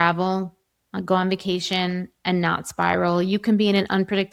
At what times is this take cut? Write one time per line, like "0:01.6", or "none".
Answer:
none

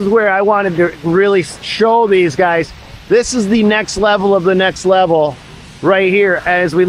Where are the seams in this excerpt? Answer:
none

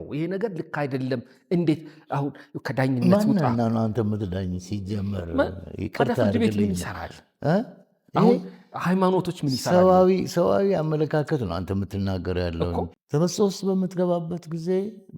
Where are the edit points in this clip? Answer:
0:13.0

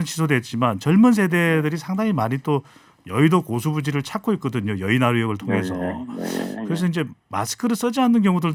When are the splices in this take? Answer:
none

